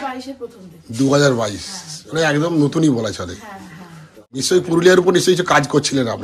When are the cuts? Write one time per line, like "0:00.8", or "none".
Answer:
0:04.4